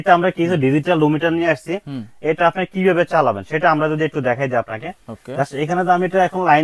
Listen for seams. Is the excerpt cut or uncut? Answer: uncut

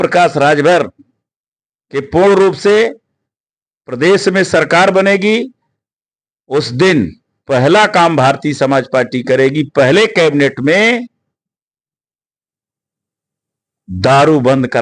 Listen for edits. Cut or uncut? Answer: uncut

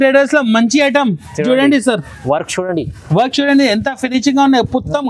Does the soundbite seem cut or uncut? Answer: uncut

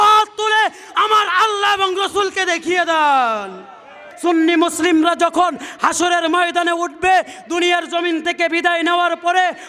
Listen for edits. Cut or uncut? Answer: cut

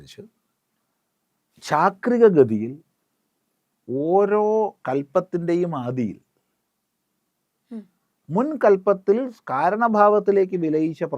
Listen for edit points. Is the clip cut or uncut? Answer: uncut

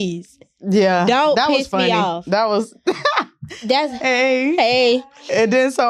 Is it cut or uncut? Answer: uncut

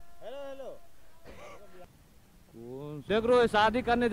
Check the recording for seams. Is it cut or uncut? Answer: cut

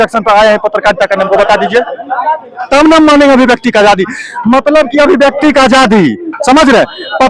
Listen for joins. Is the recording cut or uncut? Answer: uncut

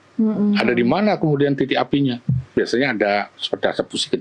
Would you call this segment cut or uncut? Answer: cut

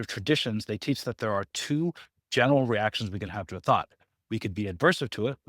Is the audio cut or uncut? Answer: uncut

